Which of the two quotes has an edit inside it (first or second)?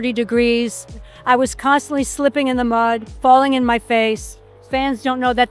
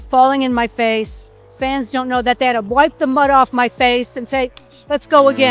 first